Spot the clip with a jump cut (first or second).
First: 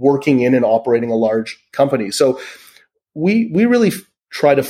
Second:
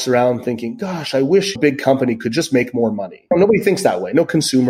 second